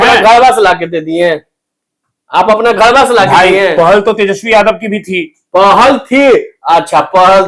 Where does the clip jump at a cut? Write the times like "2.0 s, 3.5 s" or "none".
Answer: none

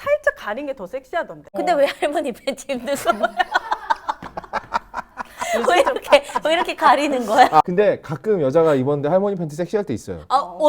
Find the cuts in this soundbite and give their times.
1.5 s, 7.6 s

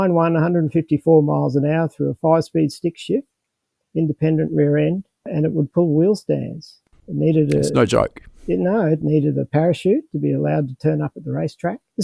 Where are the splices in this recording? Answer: none

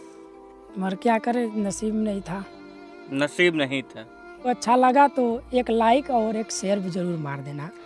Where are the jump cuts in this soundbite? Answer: 4.5 s

